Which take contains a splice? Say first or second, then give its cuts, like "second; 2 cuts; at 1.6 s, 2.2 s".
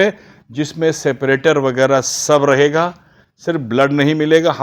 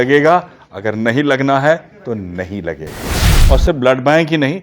second; 1 cut; at 3.3 s